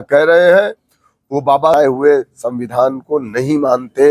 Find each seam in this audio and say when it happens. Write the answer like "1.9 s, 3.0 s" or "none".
1.5 s